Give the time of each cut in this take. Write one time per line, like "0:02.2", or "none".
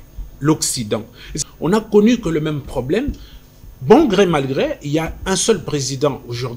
0:01.4